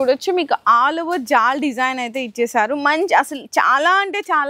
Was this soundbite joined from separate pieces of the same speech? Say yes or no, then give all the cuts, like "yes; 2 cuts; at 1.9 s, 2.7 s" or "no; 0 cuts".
no; 0 cuts